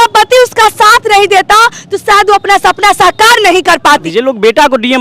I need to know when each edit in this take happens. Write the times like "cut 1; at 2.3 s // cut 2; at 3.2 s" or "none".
cut 1; at 4.1 s